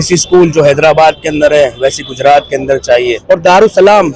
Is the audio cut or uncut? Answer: cut